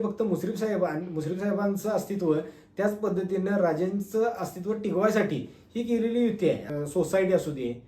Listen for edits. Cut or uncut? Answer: cut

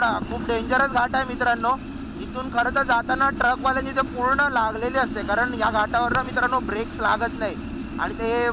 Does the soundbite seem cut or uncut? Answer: uncut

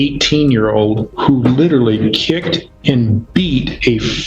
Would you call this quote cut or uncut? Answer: cut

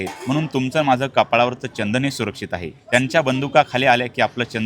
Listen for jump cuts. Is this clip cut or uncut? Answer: cut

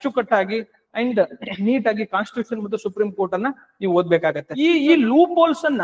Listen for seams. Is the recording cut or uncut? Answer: cut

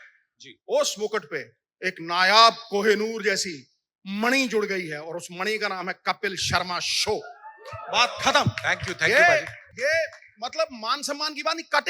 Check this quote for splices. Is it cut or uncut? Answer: uncut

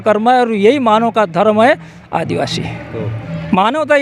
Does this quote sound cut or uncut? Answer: uncut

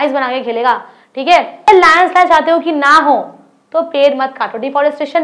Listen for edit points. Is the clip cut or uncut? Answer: cut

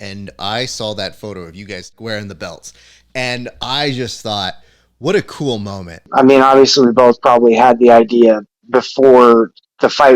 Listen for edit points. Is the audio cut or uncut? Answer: cut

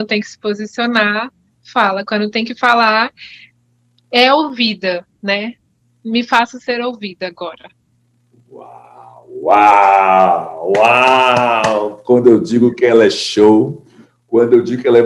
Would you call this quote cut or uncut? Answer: uncut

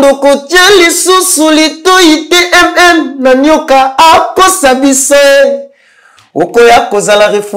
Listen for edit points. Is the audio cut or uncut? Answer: uncut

